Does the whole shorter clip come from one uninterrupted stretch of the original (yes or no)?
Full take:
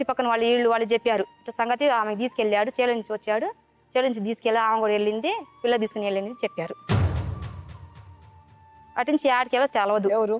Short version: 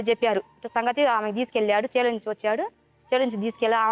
yes